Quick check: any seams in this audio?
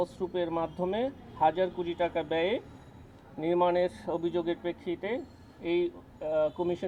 no; 0 cuts

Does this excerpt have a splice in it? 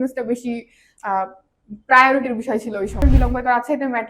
yes; 1 cut; at 3.0 s

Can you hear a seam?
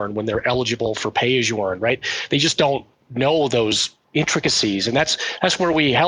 yes; 2 cuts; at 3.0 s, 3.9 s

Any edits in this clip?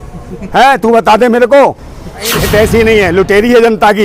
yes; 1 cut; at 2.4 s

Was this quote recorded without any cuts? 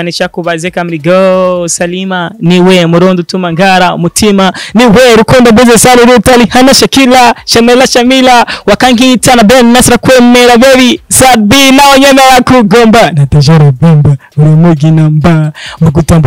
yes; 0 cuts

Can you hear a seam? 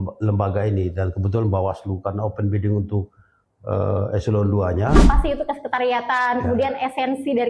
yes; 1 cut; at 5.0 s

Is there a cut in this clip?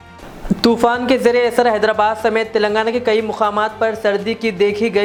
no; 0 cuts

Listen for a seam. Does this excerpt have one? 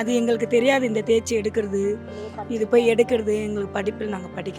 no; 0 cuts

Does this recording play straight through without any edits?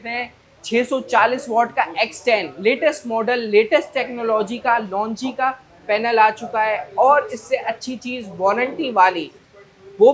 yes; 0 cuts

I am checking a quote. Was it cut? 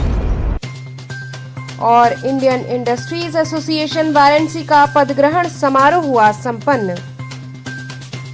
no; 0 cuts

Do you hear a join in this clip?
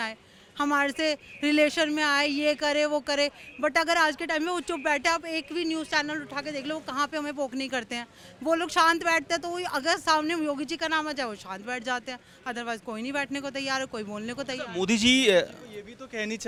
no; 0 cuts

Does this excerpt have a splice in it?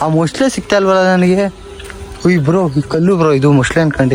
no; 0 cuts

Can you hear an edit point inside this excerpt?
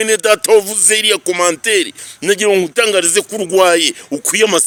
no; 0 cuts

